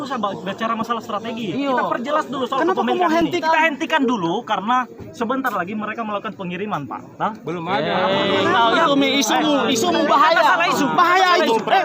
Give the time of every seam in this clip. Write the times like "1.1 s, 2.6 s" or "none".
3.2 s